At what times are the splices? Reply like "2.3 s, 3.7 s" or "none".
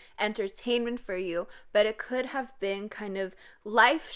none